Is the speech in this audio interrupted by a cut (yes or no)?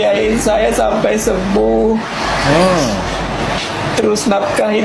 no